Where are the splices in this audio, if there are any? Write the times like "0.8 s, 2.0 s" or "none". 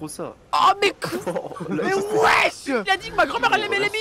2.8 s